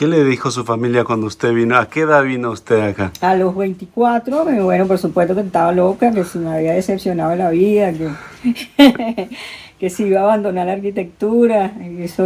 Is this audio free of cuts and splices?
yes; 0 cuts

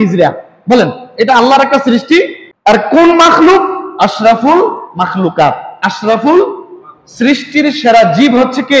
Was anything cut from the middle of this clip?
yes; 1 cut; at 2.5 s

